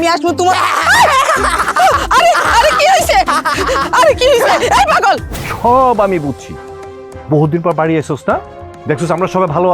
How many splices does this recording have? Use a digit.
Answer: 1